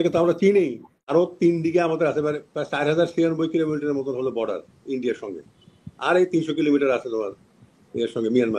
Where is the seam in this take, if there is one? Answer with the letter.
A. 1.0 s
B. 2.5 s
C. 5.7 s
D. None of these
A